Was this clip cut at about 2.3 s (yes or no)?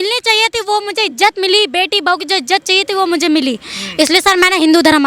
no